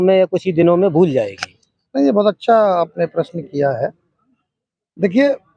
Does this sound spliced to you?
no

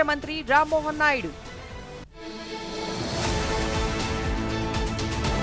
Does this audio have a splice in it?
no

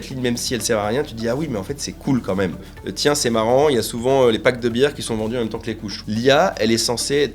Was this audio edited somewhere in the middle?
yes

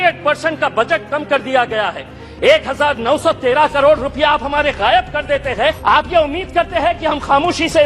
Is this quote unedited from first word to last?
no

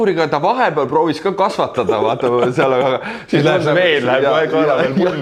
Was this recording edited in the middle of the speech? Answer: no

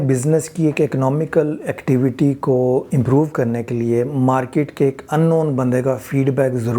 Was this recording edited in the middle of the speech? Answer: no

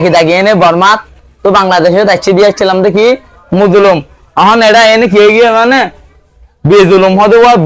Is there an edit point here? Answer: no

